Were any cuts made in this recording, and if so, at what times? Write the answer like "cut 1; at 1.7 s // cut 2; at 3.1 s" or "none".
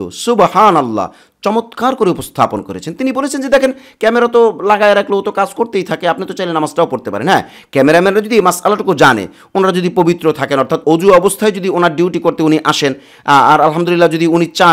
none